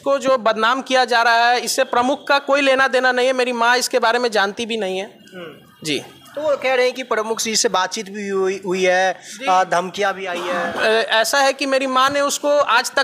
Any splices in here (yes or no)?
no